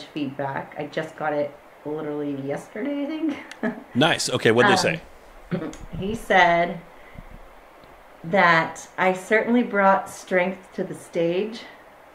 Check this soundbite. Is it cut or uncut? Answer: uncut